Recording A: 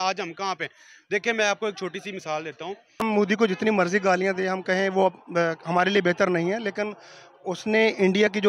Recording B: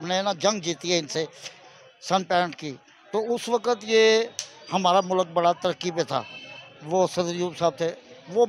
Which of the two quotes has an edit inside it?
A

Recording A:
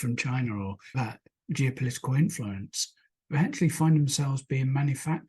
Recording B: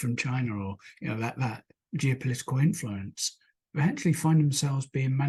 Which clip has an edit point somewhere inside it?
A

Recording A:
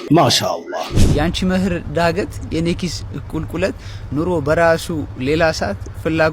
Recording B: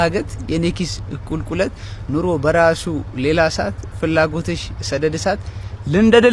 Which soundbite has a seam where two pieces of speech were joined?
A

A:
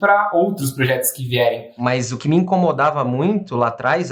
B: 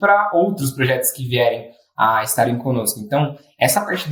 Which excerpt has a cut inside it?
A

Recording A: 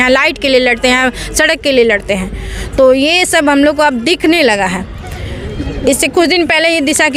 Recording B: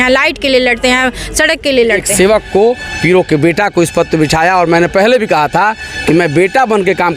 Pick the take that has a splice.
B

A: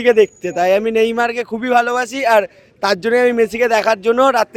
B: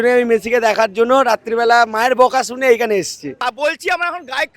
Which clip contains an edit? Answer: B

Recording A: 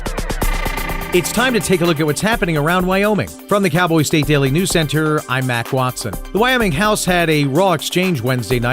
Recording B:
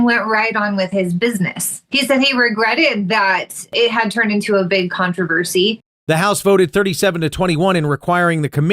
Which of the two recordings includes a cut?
A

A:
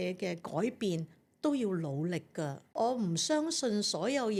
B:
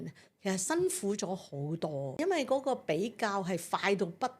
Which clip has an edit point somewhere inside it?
B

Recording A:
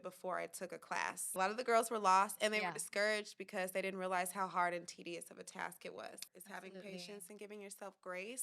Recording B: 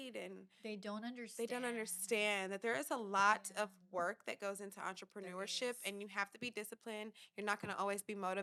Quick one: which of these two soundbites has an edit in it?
A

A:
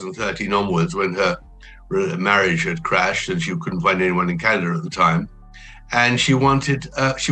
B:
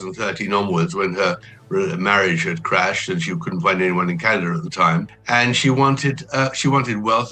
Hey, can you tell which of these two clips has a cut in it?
B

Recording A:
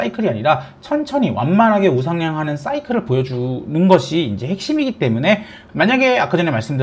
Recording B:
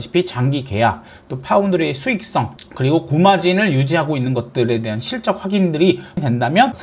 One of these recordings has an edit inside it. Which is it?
A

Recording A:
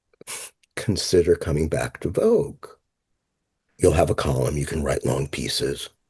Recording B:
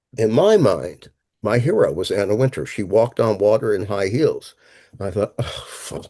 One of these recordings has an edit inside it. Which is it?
A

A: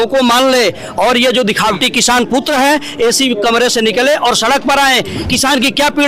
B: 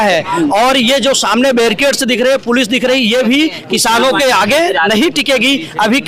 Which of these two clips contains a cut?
A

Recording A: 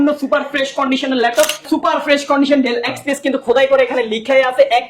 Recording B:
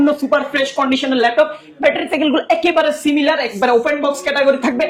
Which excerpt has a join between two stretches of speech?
A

